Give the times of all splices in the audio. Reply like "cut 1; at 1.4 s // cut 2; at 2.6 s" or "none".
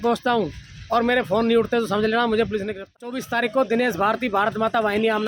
cut 1; at 3.1 s